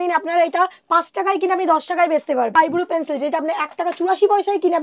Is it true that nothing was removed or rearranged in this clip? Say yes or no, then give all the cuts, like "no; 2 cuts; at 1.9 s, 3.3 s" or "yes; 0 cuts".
no; 1 cut; at 2.5 s